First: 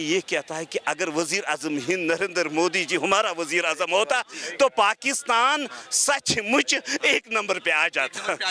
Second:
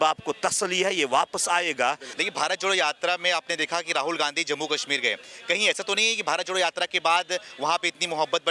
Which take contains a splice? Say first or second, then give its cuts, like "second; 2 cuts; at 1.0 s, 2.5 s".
second; 1 cut; at 2.1 s